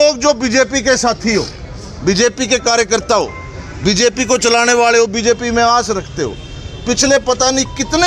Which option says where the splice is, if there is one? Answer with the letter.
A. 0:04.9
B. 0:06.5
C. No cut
C